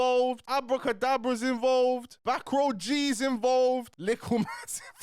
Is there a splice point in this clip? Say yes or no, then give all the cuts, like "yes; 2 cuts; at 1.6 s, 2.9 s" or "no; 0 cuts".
yes; 1 cut; at 3.9 s